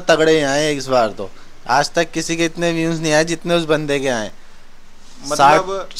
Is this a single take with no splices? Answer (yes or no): yes